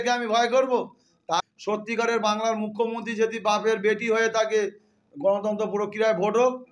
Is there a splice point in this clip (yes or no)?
yes